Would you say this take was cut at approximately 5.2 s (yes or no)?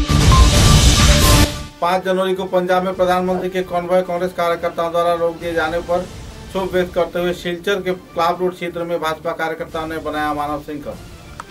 no